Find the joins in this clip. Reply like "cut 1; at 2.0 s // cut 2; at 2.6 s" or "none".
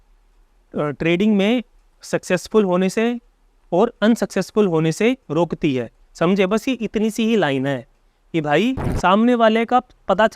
cut 1; at 8.9 s